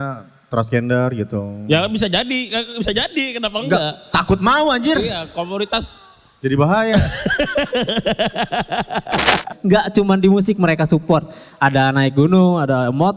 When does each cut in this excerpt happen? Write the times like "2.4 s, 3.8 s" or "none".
9.5 s